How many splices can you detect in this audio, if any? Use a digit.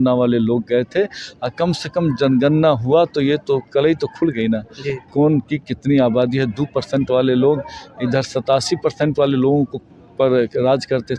0